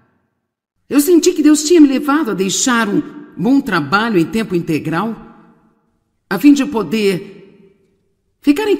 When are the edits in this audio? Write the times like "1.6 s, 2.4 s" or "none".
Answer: none